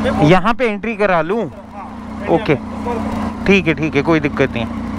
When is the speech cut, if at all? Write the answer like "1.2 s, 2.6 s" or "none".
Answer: none